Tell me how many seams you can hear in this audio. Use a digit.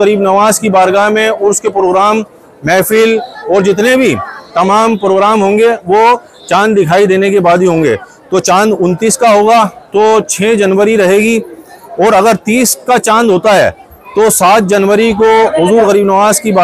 0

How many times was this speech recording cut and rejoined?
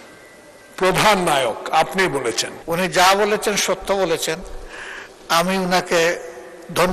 1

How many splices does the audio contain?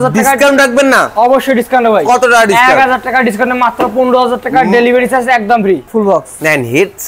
1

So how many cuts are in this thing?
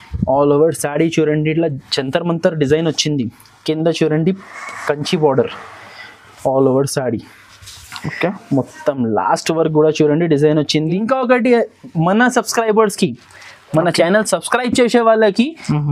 1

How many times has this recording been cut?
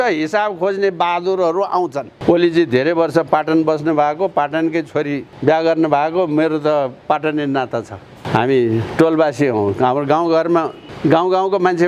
3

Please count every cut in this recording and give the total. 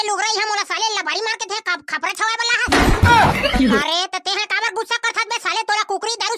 0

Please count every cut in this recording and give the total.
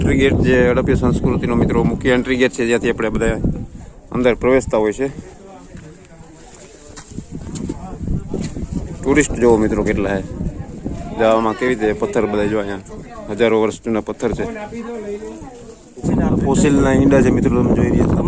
2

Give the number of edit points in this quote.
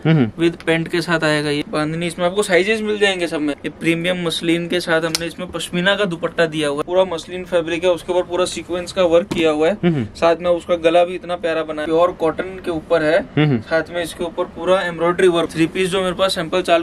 5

